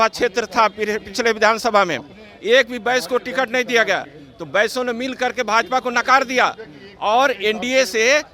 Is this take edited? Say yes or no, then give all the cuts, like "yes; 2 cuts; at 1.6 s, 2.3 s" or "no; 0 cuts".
no; 0 cuts